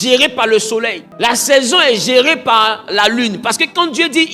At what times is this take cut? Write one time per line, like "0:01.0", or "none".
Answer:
0:01.0